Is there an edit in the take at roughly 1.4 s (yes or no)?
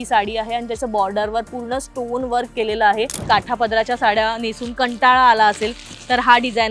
no